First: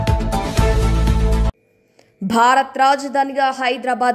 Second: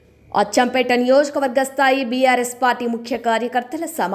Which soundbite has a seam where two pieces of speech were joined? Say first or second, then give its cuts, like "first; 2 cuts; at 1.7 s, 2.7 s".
first; 1 cut; at 1.4 s